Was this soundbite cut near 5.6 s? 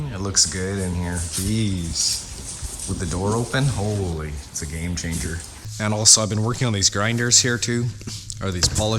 yes; 1 cut; at 5.6 s

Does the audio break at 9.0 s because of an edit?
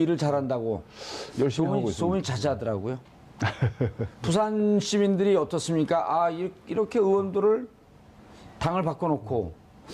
yes; 1 cut; at 9.0 s

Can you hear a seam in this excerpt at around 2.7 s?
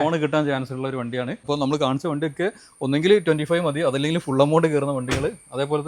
no; 1 cut; at 1.5 s

